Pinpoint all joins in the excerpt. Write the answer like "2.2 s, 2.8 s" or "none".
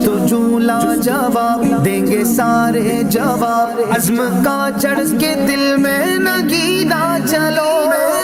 none